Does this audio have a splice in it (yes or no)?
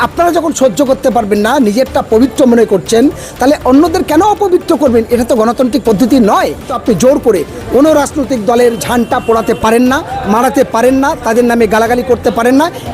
yes